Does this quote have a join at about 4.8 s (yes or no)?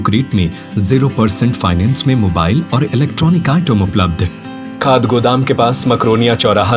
yes